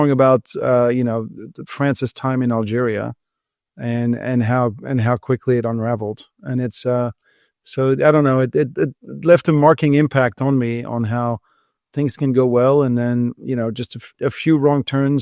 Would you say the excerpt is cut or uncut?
uncut